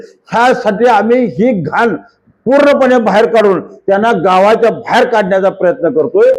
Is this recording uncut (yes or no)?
yes